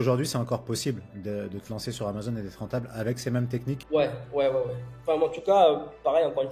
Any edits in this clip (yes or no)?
yes